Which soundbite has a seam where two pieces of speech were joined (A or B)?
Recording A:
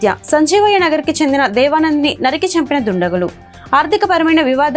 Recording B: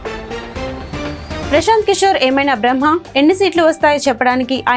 B